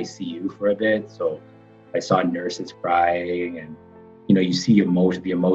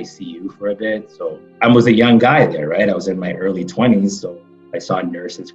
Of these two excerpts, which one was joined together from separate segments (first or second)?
second